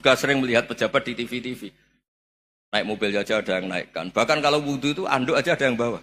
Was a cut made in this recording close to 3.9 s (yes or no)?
no